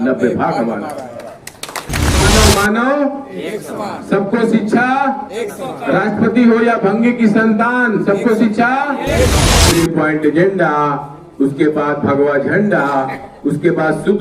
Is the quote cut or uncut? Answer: cut